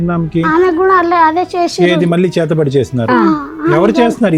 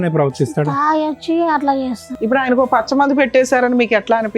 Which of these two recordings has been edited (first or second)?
second